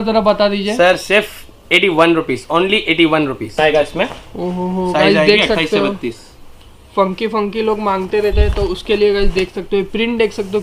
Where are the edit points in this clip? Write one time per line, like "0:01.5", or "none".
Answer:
0:03.6